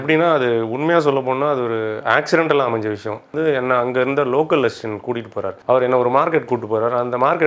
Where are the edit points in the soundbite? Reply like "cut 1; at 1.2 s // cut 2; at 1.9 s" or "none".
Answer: cut 1; at 3.3 s // cut 2; at 5.5 s